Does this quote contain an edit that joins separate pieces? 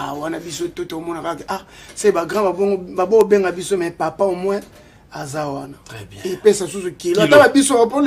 no; 0 cuts

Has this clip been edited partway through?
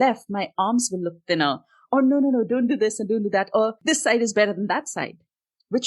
yes; 1 cut; at 3.8 s

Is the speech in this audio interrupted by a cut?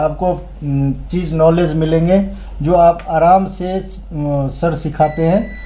no; 0 cuts

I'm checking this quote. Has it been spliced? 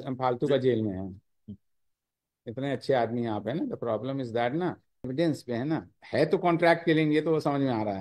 yes; 1 cut; at 5.1 s

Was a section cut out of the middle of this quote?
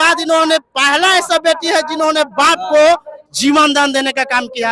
no; 0 cuts

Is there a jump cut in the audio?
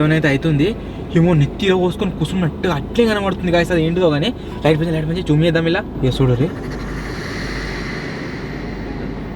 no; 0 cuts

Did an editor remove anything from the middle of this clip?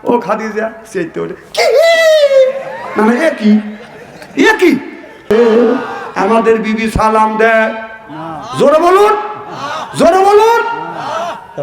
yes; 1 cut; at 5.3 s

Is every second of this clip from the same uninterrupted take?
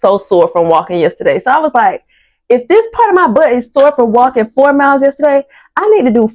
yes; 0 cuts

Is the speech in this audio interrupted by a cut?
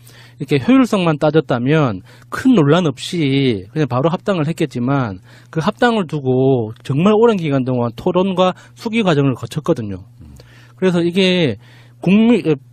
yes; 1 cut; at 5.6 s

